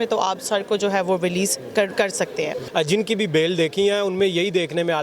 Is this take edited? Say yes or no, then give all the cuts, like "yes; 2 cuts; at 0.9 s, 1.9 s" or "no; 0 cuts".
yes; 1 cut; at 2.6 s